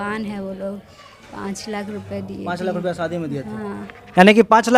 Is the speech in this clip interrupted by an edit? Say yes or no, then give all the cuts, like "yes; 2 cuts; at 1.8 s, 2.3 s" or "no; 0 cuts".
no; 0 cuts